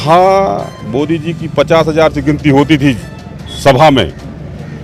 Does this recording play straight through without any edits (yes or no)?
yes